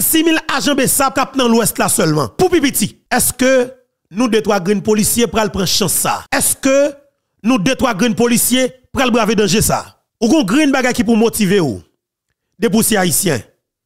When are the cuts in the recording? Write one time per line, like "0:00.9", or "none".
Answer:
0:01.1
0:02.3
0:03.0
0:06.2
0:10.0